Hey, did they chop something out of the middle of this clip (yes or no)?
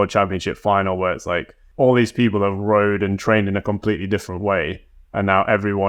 yes